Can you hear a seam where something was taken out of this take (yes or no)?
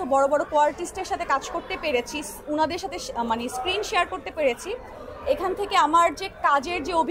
no